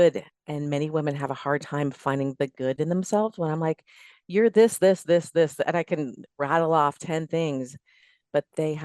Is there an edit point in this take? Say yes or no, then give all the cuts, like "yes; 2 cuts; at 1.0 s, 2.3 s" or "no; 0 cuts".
no; 0 cuts